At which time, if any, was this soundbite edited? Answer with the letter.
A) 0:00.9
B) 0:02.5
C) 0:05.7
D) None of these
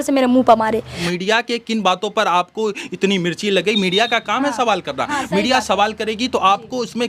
A